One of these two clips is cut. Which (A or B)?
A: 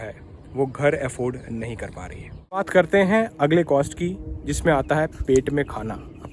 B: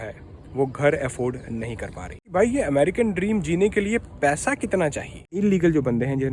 B